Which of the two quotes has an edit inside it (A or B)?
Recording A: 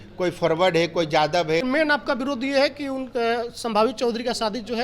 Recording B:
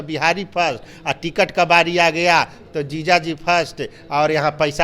A